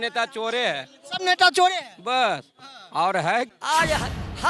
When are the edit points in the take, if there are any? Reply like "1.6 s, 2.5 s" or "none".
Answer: 3.5 s